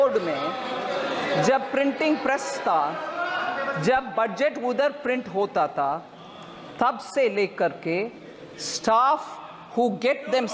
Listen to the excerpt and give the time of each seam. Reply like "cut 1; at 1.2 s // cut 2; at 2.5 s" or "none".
none

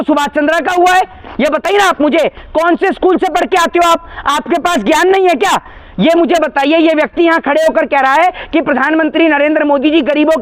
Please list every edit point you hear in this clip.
none

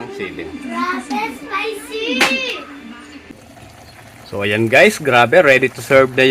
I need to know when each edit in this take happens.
cut 1; at 3.2 s

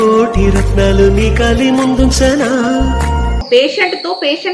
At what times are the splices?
cut 1; at 3.4 s

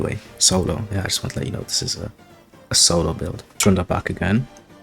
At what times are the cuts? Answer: cut 1; at 3.4 s

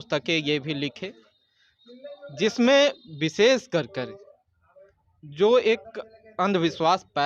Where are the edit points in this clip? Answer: none

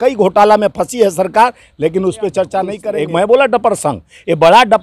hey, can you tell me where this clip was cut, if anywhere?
cut 1; at 2.8 s

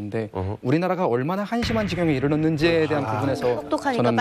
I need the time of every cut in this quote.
none

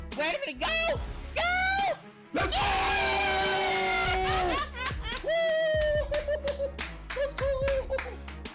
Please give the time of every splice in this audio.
none

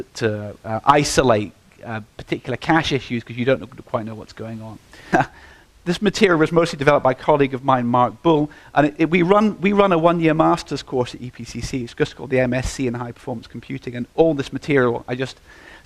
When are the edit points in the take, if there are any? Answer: cut 1; at 12.7 s

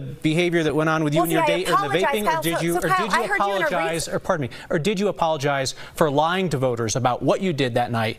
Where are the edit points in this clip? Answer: none

